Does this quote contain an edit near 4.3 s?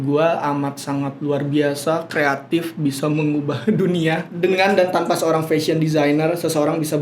yes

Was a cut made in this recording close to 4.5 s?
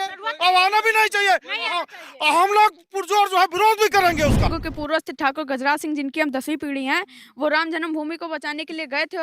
yes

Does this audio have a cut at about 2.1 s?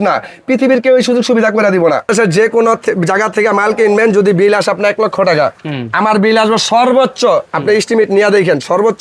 yes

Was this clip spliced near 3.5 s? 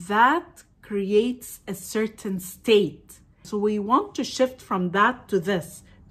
yes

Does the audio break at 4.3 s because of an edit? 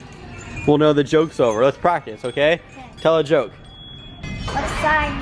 yes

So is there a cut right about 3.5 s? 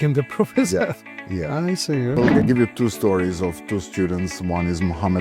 no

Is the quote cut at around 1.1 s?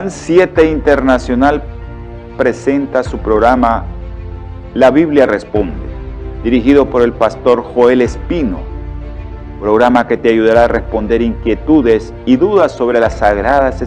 no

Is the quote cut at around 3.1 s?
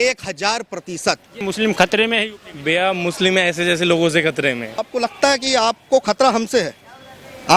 no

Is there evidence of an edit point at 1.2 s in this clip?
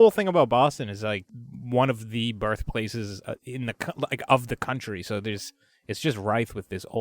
yes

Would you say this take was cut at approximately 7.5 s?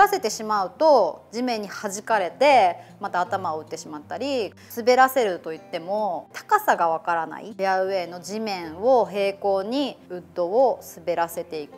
yes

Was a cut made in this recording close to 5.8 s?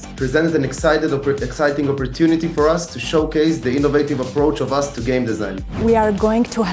yes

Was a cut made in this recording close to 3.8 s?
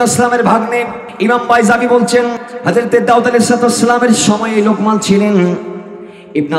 no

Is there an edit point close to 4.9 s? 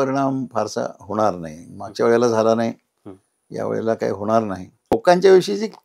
yes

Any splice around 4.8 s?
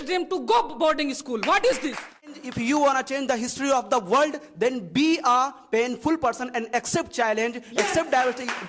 no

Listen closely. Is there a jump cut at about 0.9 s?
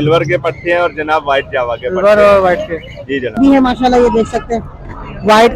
no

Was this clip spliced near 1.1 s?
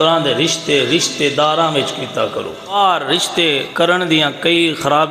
no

